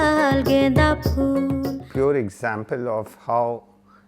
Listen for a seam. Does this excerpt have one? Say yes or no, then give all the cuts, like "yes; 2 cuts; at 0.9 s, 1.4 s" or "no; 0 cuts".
yes; 1 cut; at 1.5 s